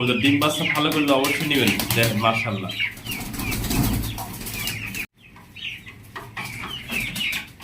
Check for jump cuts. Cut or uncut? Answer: cut